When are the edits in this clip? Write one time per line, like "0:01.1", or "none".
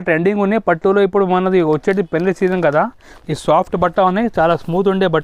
0:03.1